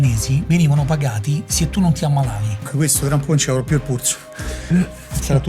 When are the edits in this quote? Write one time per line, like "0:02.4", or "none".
0:02.7